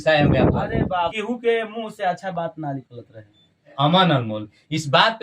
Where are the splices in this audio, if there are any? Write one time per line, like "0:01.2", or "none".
0:01.1
0:03.7